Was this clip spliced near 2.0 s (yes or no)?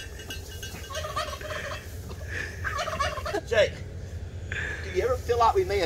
no